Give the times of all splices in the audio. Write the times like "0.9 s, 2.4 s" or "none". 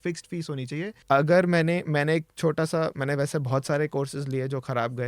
1.0 s

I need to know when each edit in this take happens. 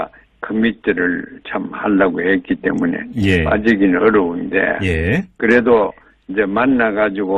2.0 s

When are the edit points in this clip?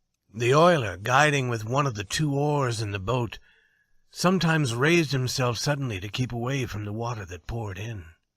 2.6 s

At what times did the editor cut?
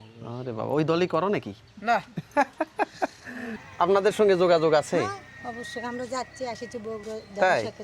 3.4 s

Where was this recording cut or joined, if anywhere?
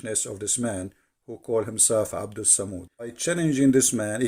3.2 s

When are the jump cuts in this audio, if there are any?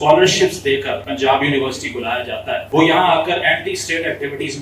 1.1 s, 2.6 s

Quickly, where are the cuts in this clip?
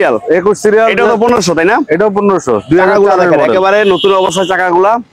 none

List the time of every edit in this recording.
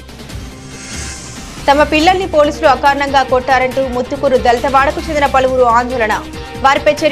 0.9 s

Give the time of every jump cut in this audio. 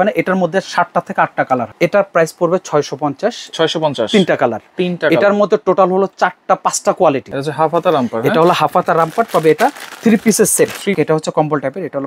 1.7 s, 7.3 s, 11.0 s

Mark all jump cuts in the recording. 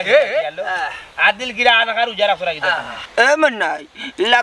3.0 s

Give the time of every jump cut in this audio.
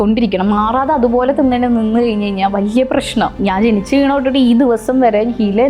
3.4 s

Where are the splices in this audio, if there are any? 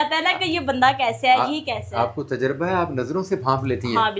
none

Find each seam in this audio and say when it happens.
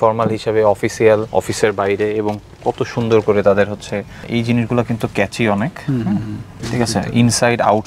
none

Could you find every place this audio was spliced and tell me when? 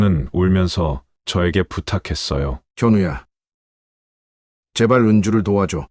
none

